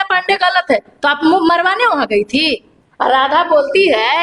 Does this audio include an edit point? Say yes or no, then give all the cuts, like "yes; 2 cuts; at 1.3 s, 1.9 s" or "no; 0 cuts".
yes; 1 cut; at 2.7 s